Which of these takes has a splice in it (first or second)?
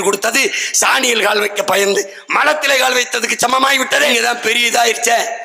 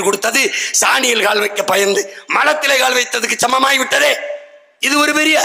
first